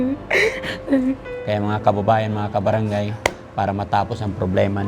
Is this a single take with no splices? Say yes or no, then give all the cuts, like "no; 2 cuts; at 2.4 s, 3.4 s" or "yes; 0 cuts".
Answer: no; 1 cut; at 1.3 s